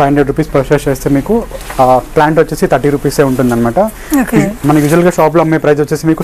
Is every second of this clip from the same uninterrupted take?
yes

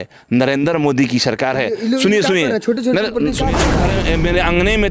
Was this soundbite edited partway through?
yes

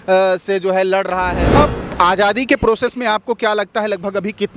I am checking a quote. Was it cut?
yes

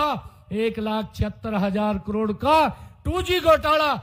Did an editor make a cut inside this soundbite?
no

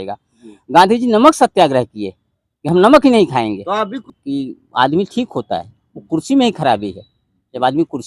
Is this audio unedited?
no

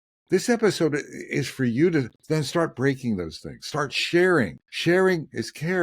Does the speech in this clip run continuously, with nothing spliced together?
no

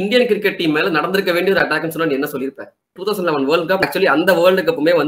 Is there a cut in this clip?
yes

